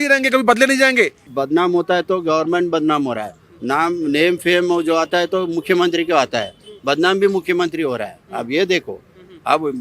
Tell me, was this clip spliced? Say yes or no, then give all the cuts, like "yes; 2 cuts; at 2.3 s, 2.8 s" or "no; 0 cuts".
yes; 1 cut; at 1.3 s